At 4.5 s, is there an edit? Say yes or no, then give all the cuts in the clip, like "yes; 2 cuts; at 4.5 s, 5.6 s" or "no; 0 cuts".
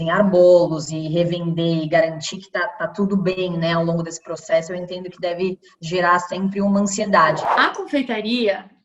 no; 1 cut; at 7.4 s